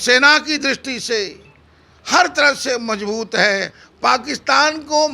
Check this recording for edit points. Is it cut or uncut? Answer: cut